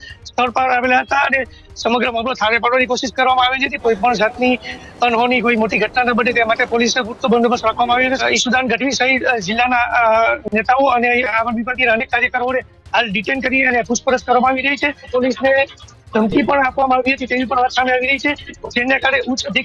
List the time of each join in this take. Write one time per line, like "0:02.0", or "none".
0:03.7
0:08.2
0:15.1